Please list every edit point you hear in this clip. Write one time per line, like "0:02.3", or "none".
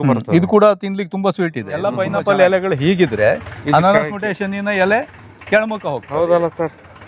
0:01.9